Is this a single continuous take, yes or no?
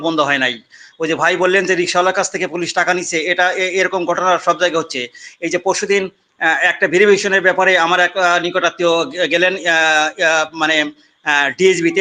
yes